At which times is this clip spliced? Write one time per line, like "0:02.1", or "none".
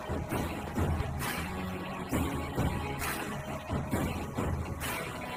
none